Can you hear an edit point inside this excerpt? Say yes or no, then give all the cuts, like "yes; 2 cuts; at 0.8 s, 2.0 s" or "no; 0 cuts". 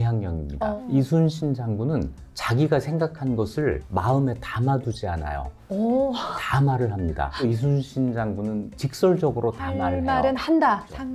yes; 1 cut; at 7.4 s